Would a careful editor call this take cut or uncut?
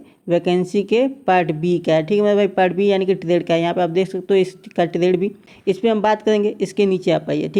uncut